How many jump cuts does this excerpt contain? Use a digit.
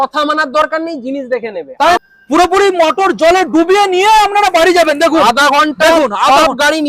1